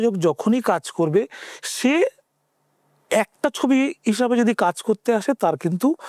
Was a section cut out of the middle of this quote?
no; 0 cuts

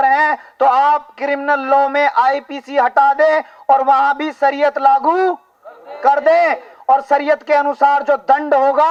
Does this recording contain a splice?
no; 0 cuts

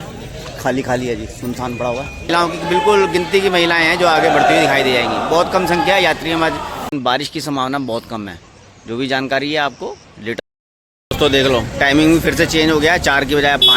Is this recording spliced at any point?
yes; 3 cuts; at 2.3 s, 6.9 s, 10.4 s

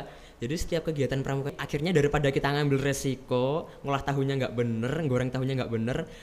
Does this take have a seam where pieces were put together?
yes; 1 cut; at 1.5 s

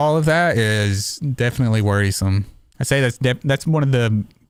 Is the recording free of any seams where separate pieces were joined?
yes; 0 cuts

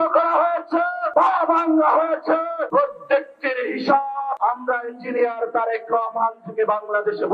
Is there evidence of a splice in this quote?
yes; 3 cuts; at 1.0 s, 2.6 s, 4.4 s

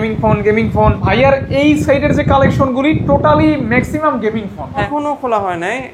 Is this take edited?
yes; 2 cuts; at 1.0 s, 4.9 s

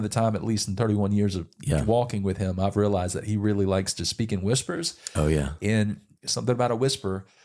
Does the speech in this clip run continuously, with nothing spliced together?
yes; 0 cuts

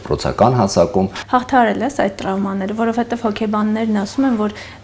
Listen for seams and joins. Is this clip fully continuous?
no; 1 cut; at 1.2 s

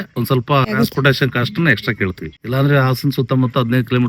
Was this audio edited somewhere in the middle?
yes; 2 cuts; at 0.9 s, 2.4 s

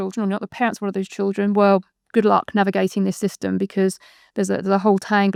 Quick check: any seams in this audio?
no; 0 cuts

